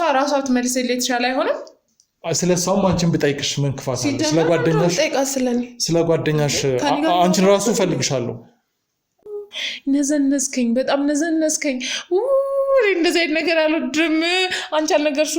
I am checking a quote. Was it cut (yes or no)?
yes